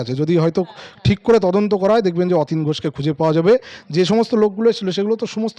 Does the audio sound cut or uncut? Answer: uncut